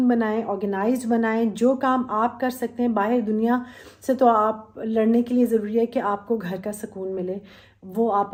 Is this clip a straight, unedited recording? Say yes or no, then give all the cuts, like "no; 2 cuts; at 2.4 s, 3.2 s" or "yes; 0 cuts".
yes; 0 cuts